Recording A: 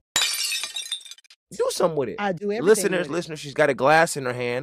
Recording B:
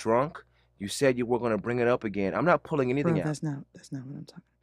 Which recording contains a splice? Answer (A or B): A